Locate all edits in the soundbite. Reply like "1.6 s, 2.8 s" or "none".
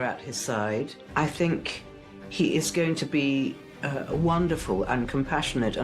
1.0 s